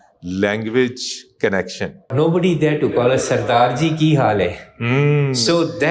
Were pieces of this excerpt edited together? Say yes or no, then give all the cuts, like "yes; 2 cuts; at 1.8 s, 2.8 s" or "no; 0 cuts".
yes; 1 cut; at 2.1 s